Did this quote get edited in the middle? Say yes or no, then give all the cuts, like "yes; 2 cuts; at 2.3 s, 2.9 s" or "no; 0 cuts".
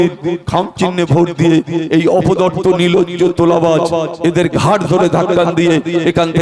no; 0 cuts